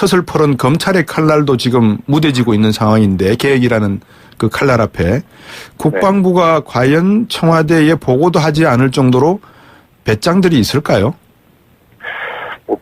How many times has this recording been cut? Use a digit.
1